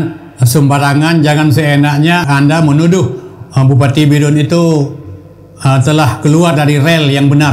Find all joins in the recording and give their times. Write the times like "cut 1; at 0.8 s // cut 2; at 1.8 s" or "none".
cut 1; at 2.2 s